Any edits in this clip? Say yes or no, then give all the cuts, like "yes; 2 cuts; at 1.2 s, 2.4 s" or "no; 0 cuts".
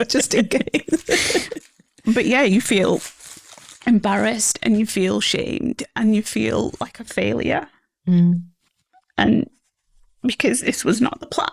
yes; 1 cut; at 10.6 s